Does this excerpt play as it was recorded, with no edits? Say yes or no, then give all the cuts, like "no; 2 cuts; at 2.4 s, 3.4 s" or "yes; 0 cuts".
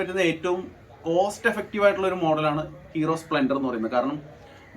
yes; 0 cuts